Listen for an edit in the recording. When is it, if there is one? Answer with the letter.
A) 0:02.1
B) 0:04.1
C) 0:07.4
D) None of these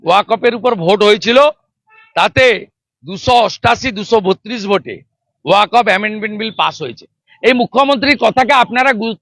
D